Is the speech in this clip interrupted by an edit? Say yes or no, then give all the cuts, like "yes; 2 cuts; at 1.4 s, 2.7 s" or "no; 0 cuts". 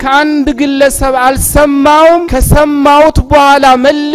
yes; 1 cut; at 2.3 s